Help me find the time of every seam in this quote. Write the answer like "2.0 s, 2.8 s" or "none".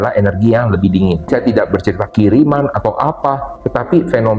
1.3 s